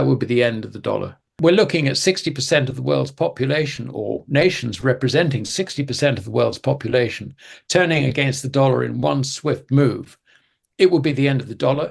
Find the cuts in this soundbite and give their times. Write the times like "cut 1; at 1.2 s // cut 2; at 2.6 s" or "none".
cut 1; at 1.3 s